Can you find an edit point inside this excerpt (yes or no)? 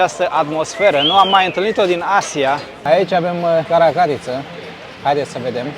yes